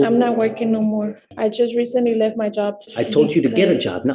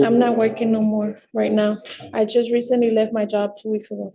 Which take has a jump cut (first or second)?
first